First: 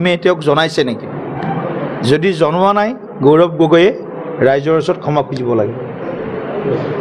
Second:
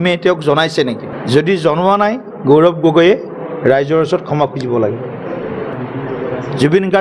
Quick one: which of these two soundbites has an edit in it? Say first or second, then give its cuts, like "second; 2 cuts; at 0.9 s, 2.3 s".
second; 2 cuts; at 1.1 s, 5.7 s